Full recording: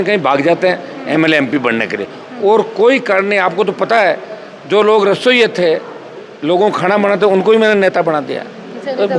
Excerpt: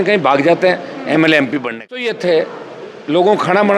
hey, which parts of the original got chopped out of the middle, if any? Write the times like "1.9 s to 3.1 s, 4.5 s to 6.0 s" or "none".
2.1 s to 5.4 s

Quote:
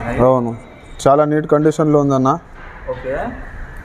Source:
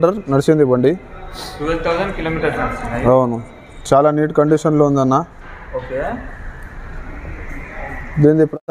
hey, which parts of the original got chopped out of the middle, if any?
none

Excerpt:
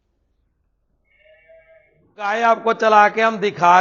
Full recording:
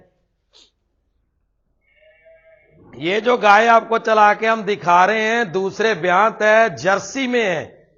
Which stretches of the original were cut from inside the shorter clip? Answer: 3.0 s to 3.5 s

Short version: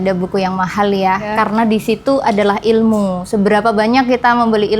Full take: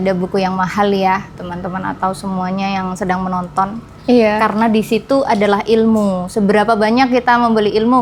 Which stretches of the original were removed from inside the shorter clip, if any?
1.3 s to 4.3 s

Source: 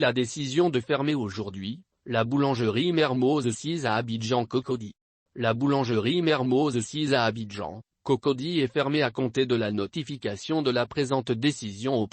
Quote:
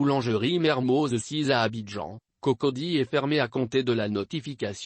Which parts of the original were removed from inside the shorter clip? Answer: 3.2 s to 6.5 s

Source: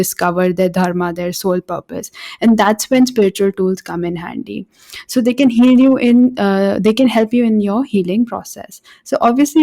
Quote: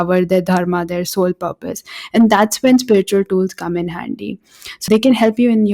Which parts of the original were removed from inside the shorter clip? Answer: 5.1 s to 6.8 s

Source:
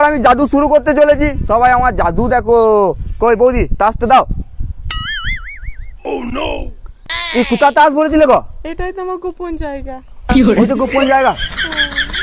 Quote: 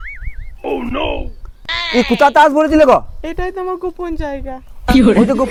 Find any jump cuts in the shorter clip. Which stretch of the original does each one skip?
none

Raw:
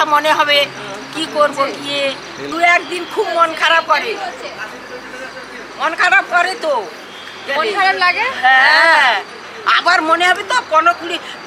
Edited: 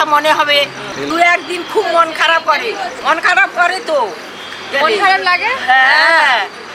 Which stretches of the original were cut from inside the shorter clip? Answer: 0.9 s to 2.3 s, 4.4 s to 5.7 s

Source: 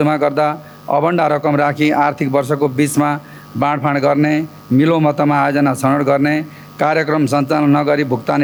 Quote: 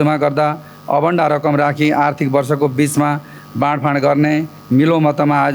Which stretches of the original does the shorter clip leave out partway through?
none

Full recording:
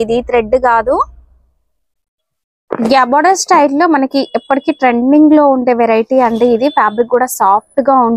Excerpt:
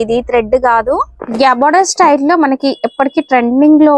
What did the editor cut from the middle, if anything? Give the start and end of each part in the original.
1.2 s to 2.7 s

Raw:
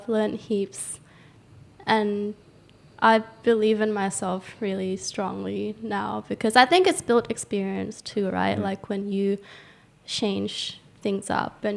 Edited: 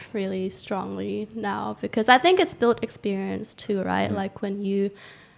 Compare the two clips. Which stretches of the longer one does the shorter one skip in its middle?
none

